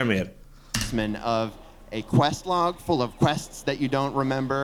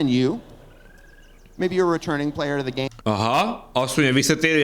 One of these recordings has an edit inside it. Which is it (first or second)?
second